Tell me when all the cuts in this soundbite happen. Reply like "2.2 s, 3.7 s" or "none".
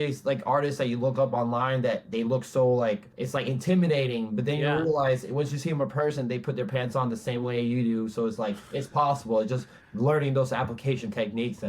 3.1 s